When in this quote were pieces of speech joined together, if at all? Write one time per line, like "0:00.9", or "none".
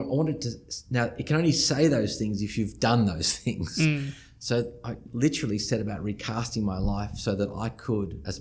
none